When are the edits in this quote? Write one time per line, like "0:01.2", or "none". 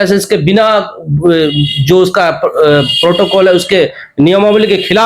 none